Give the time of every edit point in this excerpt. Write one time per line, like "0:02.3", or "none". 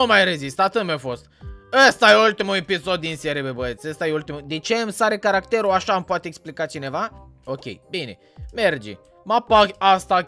0:07.3